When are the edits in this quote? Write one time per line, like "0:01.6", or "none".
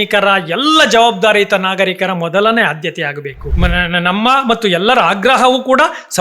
0:03.4